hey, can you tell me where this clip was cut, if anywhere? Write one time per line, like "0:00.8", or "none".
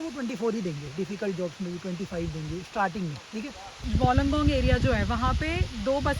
0:03.8